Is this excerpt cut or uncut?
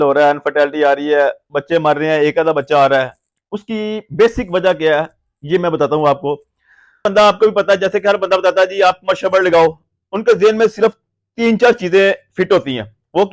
cut